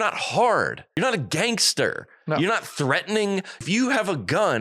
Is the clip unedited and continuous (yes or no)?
no